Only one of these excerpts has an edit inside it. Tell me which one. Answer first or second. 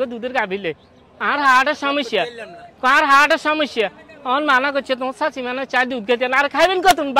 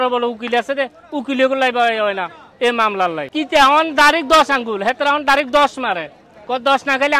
second